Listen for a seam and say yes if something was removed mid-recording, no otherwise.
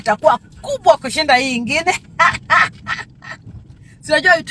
no